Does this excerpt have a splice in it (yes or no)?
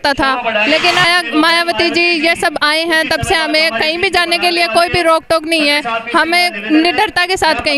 yes